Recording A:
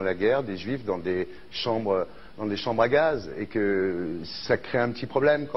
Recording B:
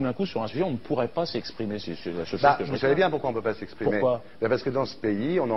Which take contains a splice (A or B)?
B